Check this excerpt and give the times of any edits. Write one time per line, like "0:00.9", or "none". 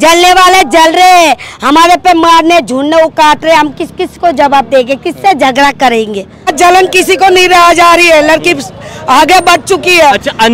0:06.5